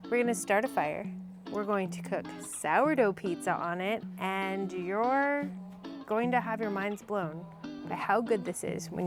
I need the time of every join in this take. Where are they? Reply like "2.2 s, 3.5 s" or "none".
none